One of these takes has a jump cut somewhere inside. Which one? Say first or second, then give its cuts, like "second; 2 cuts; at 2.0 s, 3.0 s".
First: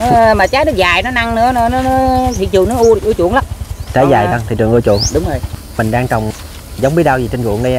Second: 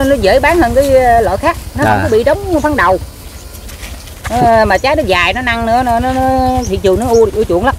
first; 1 cut; at 5.6 s